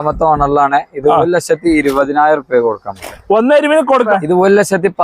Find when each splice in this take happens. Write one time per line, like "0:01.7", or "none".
0:04.1